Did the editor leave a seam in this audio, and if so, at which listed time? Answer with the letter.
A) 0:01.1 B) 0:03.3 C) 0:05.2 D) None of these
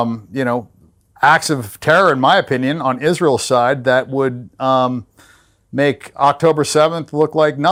D